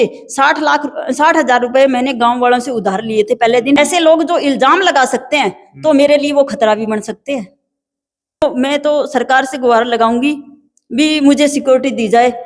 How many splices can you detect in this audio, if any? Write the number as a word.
two